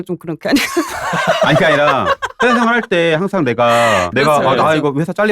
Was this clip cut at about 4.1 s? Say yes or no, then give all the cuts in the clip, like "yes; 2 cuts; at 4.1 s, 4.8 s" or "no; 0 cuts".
yes; 1 cut; at 4.1 s